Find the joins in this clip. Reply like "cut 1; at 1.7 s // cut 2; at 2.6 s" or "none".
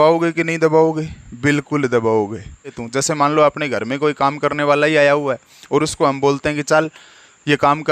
cut 1; at 2.8 s